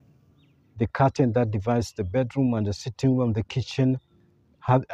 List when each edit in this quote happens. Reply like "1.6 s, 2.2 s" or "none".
none